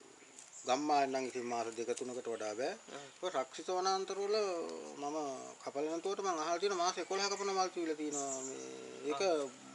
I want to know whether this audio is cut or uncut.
uncut